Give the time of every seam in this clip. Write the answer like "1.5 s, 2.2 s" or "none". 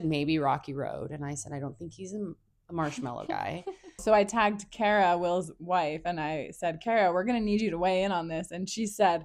4.0 s

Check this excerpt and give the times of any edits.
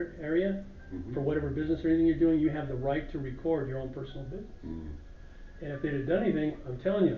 none

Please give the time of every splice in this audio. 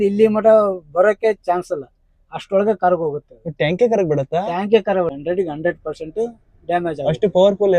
5.1 s

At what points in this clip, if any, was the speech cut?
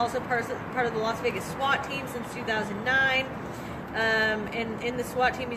3.4 s

